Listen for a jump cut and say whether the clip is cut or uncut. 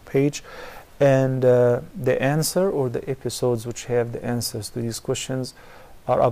cut